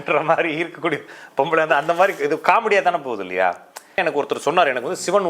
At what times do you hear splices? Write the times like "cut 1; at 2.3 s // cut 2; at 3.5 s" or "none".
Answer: cut 1; at 4.0 s